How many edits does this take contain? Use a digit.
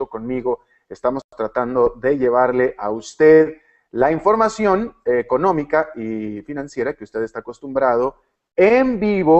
1